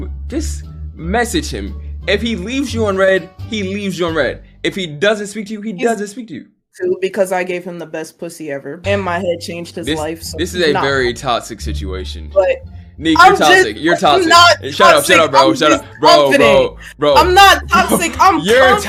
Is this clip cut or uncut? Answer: uncut